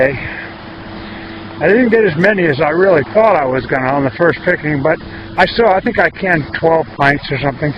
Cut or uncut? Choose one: uncut